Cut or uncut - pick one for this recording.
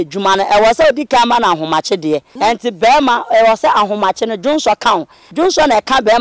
cut